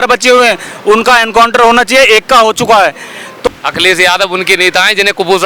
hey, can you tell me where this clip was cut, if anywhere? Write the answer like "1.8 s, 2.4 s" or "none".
3.5 s